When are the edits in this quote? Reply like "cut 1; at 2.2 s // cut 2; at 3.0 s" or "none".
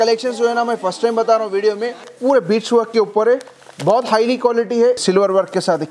cut 1; at 2.1 s // cut 2; at 5.0 s